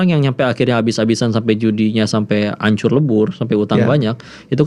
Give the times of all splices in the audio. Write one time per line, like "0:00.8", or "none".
none